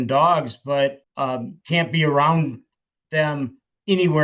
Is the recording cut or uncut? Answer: cut